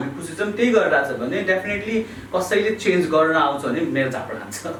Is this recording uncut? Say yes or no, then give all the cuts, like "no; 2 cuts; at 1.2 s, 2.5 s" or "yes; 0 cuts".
yes; 0 cuts